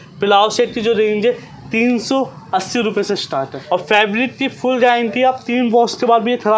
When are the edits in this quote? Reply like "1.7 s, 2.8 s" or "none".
3.5 s